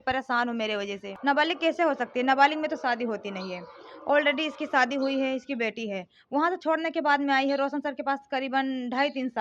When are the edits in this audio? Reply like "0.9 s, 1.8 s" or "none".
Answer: 1.2 s